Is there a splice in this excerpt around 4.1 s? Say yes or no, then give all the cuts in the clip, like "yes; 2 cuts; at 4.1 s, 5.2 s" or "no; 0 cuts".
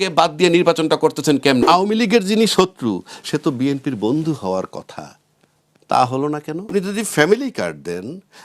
no; 2 cuts; at 1.6 s, 6.7 s